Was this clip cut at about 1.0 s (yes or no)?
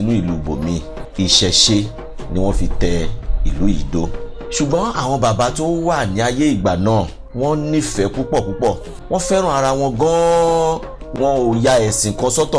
yes